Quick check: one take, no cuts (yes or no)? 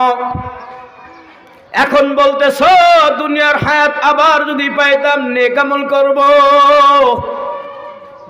yes